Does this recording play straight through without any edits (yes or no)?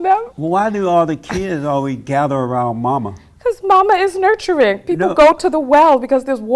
yes